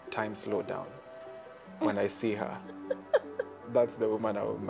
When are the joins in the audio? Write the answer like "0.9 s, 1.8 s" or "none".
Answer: 3.6 s